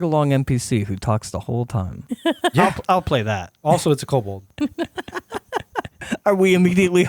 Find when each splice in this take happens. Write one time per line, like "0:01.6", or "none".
0:02.0
0:03.5
0:04.5
0:06.0